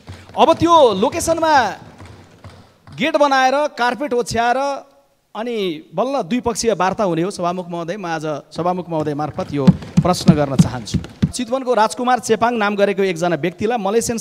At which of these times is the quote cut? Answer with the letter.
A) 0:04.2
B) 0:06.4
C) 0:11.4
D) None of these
C